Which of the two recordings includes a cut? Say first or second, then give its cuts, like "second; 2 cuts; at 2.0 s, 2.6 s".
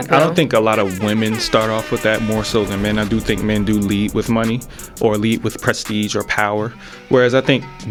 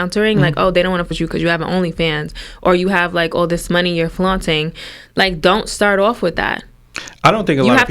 second; 1 cut; at 1.1 s